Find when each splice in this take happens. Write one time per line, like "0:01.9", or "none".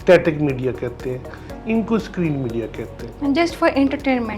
none